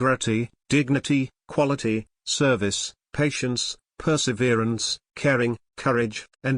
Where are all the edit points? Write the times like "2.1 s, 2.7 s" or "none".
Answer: 5.7 s